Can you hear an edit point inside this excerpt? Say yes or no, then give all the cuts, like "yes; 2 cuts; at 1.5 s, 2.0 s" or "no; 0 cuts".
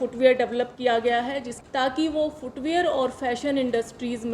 yes; 1 cut; at 1.5 s